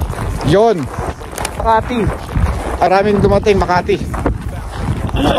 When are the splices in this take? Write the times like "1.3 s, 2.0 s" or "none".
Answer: 1.6 s, 2.9 s